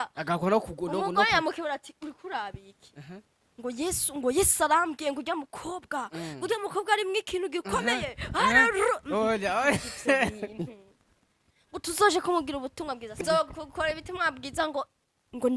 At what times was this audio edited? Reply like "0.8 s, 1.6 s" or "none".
13.2 s